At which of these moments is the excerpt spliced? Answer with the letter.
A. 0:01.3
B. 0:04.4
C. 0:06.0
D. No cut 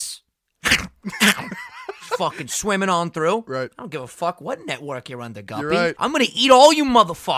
C